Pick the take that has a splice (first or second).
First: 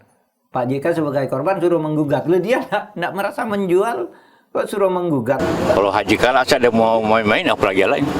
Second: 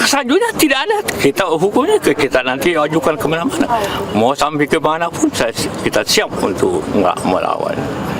first